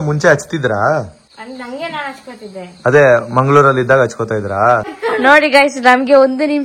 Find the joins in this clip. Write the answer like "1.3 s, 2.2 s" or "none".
1.3 s, 4.9 s